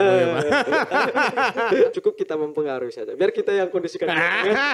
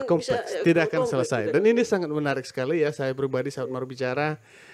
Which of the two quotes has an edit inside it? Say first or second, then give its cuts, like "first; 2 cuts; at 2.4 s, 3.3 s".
first; 1 cut; at 1.9 s